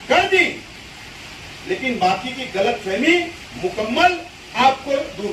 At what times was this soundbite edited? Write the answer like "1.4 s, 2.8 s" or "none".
none